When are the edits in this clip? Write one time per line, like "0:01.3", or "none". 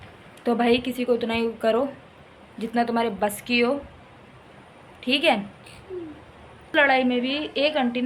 0:06.7